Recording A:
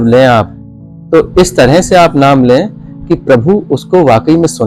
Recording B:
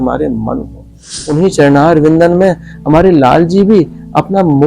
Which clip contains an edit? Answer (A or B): B